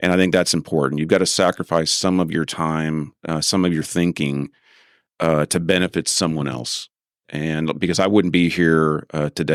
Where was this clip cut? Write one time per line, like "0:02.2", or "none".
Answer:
none